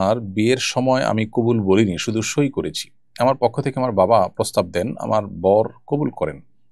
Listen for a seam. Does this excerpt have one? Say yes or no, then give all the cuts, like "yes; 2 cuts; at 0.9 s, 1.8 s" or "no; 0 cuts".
no; 0 cuts